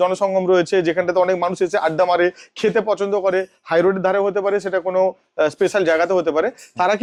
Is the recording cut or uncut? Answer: uncut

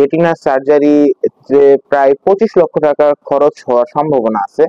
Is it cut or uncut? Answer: uncut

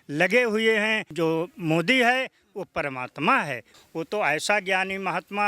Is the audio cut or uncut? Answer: cut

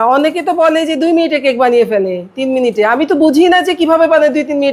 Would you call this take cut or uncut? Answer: uncut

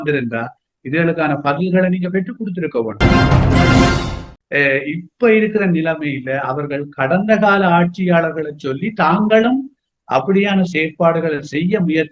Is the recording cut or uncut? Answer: cut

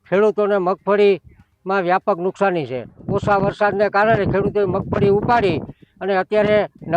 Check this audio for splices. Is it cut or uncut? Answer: cut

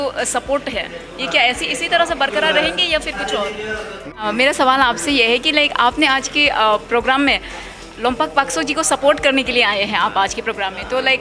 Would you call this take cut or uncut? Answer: cut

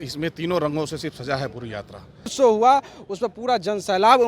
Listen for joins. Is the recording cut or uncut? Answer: cut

